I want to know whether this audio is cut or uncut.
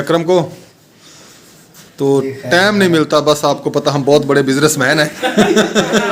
uncut